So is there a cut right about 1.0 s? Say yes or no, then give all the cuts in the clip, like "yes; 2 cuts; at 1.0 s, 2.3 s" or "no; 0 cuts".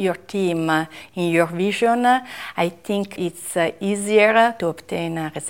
no; 2 cuts; at 3.1 s, 4.6 s